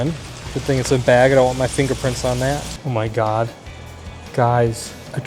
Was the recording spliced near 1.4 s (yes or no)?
no